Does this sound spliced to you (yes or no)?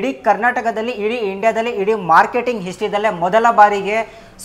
no